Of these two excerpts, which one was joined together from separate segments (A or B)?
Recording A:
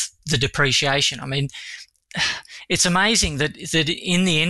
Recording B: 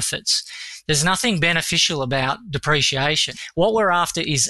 B